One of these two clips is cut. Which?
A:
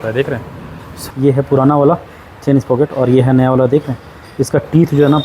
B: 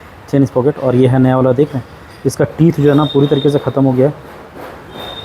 A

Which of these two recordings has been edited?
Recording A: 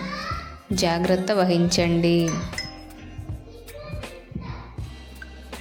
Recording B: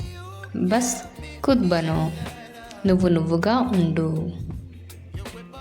B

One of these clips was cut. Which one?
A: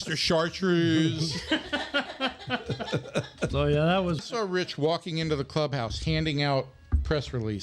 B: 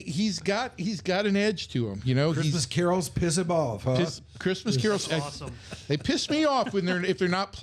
A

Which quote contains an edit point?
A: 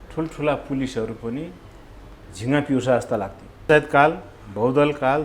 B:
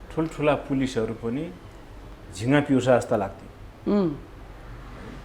A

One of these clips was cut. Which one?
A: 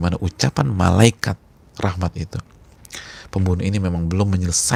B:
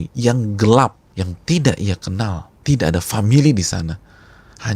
B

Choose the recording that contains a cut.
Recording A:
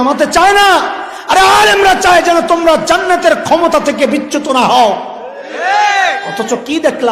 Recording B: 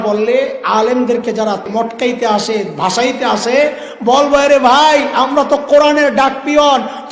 B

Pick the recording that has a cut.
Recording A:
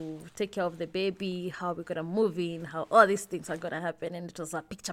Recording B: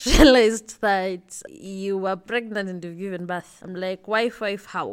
B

